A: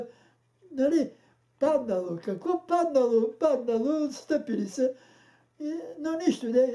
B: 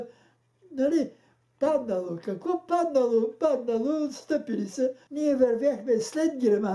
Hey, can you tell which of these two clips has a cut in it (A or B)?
B